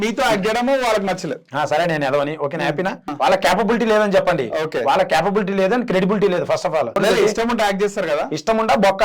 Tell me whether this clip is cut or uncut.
cut